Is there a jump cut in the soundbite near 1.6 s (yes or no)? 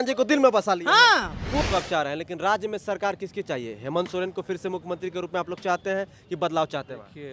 yes